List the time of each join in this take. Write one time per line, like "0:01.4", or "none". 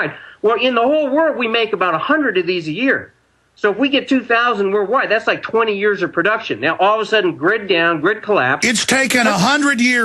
none